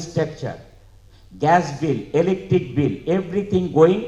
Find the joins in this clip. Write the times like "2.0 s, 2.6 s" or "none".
none